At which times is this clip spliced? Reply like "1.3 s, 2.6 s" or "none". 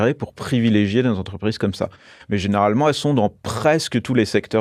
none